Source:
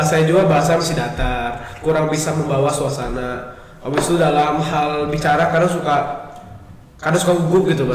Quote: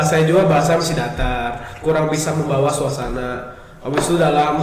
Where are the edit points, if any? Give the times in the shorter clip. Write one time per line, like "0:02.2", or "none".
none